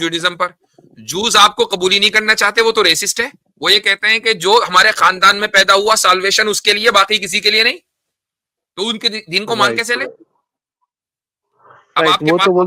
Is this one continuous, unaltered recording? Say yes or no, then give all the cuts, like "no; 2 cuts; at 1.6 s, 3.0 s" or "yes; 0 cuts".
yes; 0 cuts